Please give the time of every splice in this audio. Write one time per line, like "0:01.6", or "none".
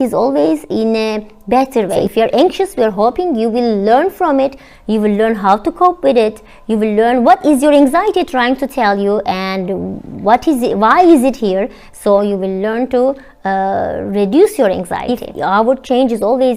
0:02.0
0:15.1